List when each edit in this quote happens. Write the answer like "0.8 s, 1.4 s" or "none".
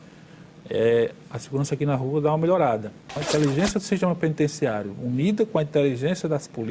3.2 s

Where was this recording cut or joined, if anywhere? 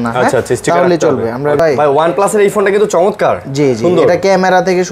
1.6 s

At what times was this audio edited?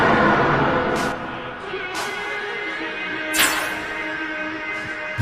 1.1 s

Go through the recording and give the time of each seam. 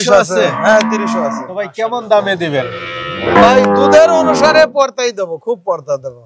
1.7 s

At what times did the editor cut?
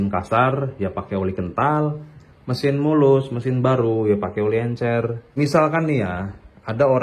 5.3 s

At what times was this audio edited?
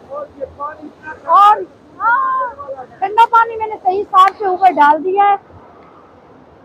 none

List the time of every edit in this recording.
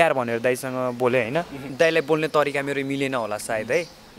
1.6 s

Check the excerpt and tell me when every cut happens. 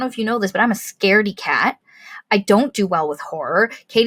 none

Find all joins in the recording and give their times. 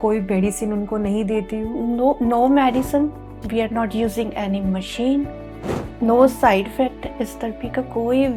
none

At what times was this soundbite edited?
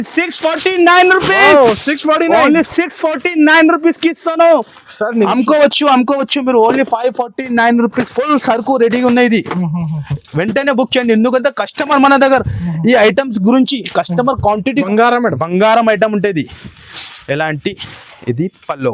5.3 s, 14.9 s

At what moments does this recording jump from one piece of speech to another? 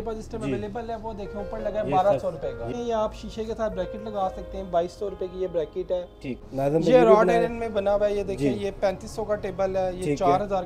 2.7 s, 6.4 s

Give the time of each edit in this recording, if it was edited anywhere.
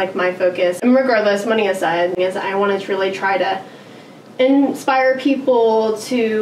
0.8 s, 2.2 s

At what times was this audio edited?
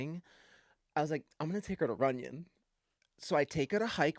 none

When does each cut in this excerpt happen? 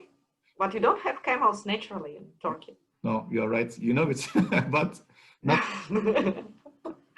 none

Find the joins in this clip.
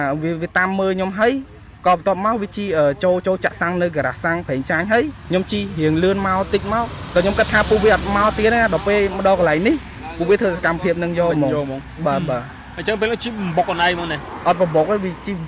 5.2 s, 7.0 s

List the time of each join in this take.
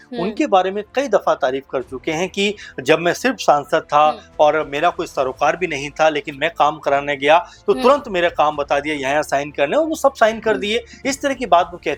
none

